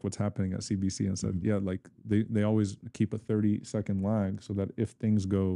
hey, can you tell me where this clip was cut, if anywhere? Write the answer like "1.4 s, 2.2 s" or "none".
none